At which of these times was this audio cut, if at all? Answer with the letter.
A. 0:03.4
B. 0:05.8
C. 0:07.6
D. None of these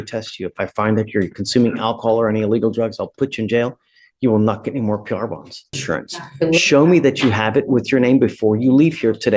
B